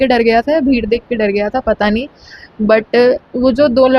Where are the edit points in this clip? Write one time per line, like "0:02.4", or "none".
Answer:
none